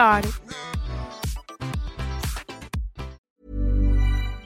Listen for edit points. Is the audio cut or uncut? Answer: cut